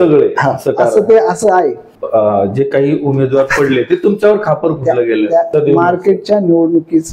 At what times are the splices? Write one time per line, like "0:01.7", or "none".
0:01.9
0:05.5